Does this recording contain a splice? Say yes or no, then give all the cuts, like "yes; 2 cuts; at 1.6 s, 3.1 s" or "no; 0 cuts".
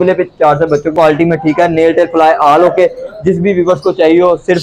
yes; 1 cut; at 0.9 s